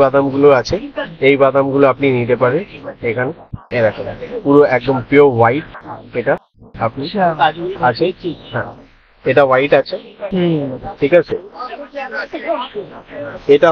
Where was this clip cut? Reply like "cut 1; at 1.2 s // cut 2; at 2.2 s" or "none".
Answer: none